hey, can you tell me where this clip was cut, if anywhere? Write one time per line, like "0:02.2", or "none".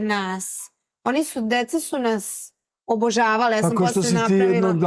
none